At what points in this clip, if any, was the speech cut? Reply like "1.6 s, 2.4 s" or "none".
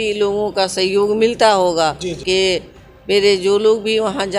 2.2 s